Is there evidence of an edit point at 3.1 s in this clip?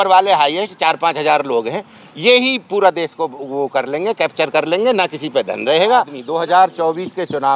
no; 1 cut; at 6.2 s

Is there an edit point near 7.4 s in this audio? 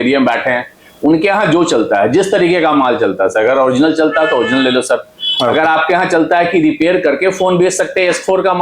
no; 0 cuts

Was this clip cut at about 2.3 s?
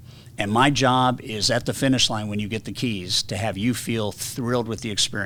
no; 0 cuts

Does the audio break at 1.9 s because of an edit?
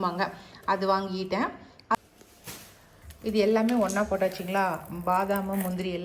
yes; 1 cut; at 1.9 s

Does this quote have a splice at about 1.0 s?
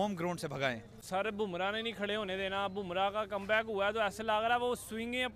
yes; 1 cut; at 1.0 s

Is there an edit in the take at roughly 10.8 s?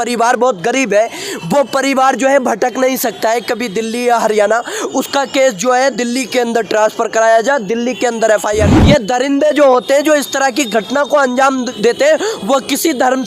no; 1 cut; at 8.8 s

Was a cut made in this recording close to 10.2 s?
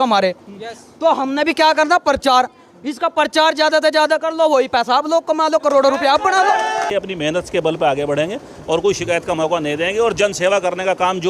no; 1 cut; at 6.9 s

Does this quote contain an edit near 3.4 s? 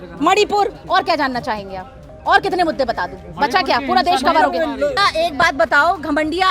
no; 1 cut; at 5.0 s

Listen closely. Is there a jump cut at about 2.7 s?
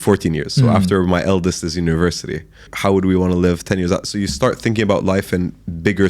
yes; 1 cut; at 2.7 s

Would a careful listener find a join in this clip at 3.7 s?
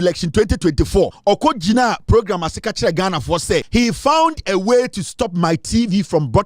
yes; 2 cuts; at 1.2 s, 3.7 s

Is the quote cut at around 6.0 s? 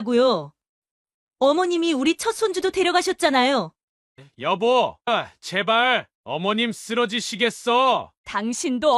no; 1 cut; at 3.8 s

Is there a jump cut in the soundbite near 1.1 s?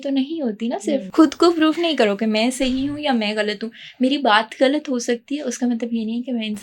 yes; 1 cut; at 1.1 s

